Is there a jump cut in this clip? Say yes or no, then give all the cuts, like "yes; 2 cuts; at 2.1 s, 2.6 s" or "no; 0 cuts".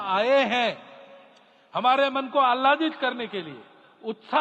no; 0 cuts